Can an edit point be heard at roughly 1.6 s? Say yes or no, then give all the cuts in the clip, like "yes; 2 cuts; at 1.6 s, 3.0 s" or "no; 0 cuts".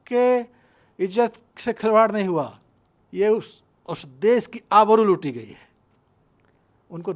no; 0 cuts